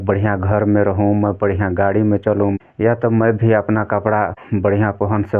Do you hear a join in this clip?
yes; 2 cuts; at 2.6 s, 4.4 s

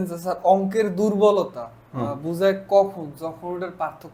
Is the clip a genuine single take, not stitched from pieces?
yes; 0 cuts

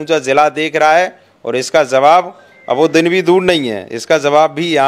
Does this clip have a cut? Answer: no; 0 cuts

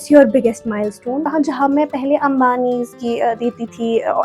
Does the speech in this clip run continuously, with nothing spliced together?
no; 1 cut; at 1.3 s

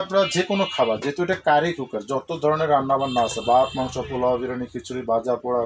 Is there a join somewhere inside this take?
no; 0 cuts

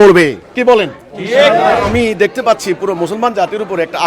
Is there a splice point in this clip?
yes; 1 cut; at 1.9 s

